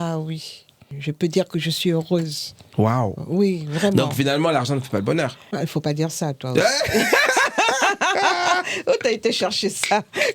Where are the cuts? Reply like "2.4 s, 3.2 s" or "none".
0.9 s